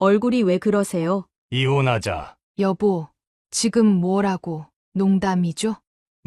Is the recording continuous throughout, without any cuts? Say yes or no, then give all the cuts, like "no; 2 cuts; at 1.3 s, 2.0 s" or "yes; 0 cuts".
no; 2 cuts; at 1.3 s, 2.4 s